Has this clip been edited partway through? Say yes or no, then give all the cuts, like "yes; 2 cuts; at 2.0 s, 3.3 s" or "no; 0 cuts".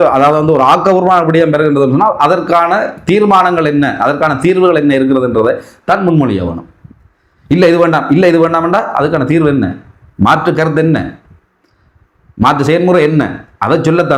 no; 0 cuts